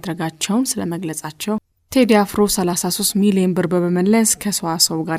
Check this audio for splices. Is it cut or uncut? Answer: cut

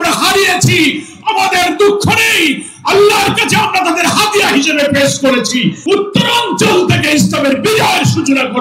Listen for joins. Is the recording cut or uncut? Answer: cut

